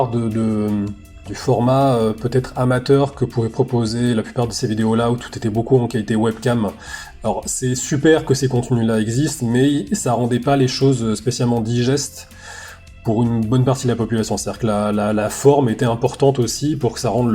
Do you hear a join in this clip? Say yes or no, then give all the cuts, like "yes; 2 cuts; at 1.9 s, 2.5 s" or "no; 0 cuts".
yes; 1 cut; at 1.3 s